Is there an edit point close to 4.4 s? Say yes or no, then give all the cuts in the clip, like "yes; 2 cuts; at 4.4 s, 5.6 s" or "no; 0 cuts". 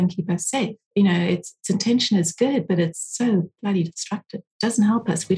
yes; 1 cut; at 4.4 s